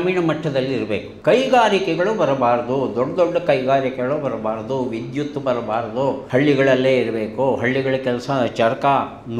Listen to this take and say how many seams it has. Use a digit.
2